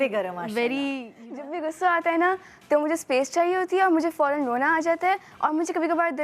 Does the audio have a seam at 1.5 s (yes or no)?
yes